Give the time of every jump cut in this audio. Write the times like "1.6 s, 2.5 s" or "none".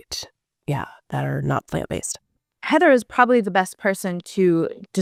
none